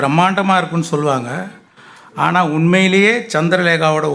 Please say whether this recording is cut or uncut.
uncut